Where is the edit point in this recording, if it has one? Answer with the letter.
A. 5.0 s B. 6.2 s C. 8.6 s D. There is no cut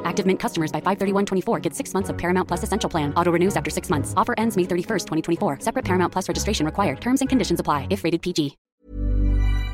C